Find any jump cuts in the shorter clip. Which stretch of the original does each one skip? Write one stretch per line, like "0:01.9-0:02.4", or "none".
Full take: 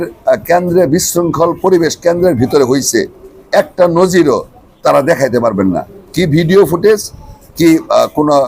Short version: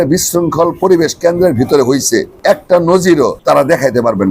0:03.1-0:03.4
0:04.5-0:04.8